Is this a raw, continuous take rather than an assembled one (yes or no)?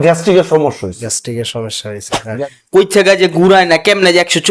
no